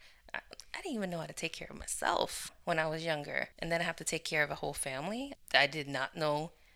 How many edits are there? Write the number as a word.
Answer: three